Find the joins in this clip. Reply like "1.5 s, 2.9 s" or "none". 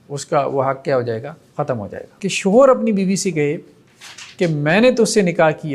2.0 s